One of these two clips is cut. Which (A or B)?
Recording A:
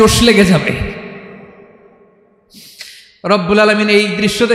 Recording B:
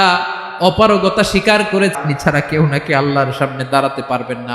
B